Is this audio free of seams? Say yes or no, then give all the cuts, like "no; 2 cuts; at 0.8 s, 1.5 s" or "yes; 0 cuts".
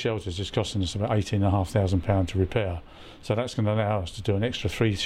yes; 0 cuts